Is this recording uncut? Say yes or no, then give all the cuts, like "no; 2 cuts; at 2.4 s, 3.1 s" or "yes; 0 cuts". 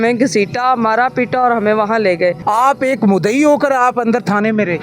no; 1 cut; at 2.4 s